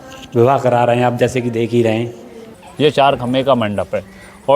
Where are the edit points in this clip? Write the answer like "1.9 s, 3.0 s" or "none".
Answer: 2.5 s